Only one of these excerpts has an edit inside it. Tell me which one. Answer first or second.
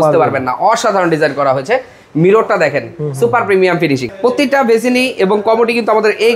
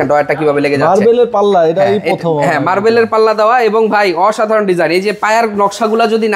first